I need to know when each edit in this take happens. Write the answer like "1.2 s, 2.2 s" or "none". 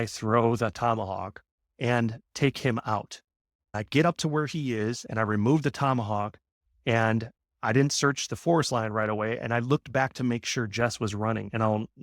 3.7 s, 7.5 s